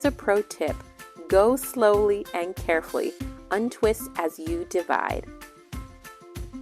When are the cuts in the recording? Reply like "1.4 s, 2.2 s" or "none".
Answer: 5.3 s